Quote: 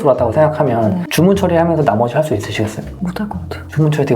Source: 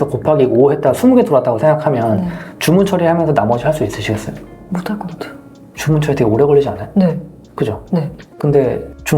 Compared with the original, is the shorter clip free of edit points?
no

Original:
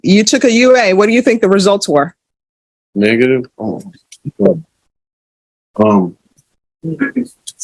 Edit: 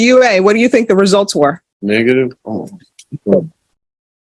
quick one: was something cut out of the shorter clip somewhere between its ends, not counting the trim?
yes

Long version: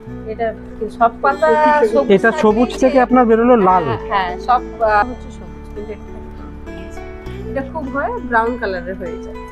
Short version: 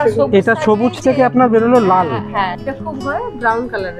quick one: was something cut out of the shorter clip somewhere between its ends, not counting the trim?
yes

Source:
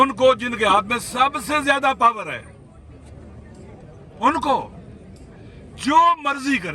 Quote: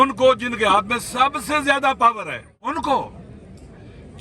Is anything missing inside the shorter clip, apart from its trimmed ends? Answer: yes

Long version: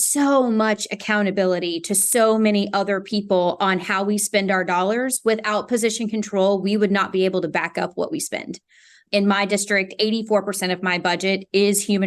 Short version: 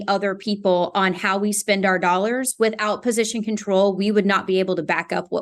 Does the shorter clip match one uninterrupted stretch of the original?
yes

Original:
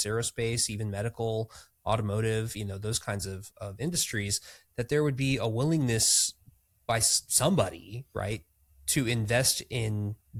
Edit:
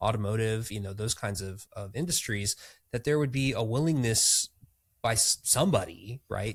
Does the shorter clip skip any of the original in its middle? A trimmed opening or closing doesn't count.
no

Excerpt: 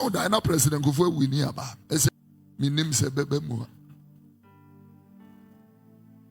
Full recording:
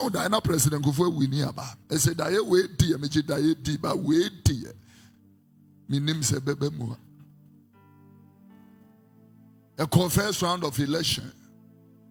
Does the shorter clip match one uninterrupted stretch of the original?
no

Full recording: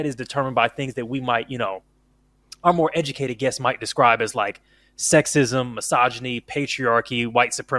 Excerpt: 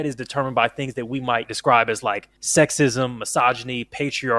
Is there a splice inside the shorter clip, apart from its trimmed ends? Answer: yes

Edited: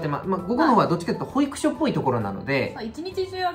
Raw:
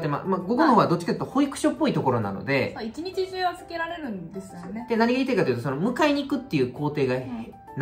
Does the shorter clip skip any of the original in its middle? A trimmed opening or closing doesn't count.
no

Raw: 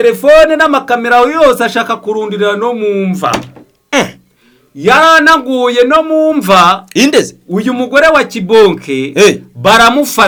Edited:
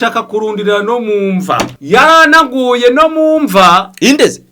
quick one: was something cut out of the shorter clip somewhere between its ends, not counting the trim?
yes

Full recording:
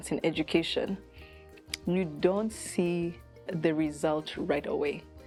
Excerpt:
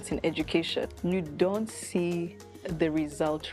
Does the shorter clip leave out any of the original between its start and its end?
yes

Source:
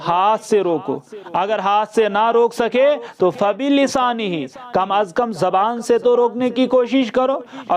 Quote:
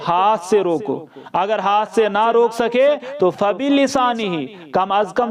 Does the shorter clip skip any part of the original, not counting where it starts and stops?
no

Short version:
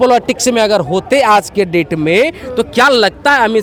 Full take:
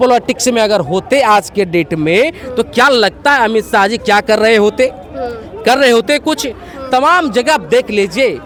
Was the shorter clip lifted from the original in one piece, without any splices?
yes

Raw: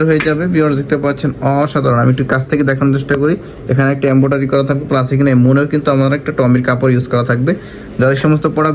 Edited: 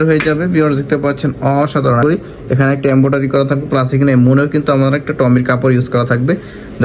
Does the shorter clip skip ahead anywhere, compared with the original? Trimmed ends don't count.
yes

